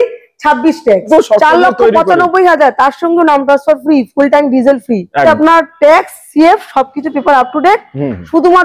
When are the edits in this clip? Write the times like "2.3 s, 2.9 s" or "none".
1.1 s, 5.2 s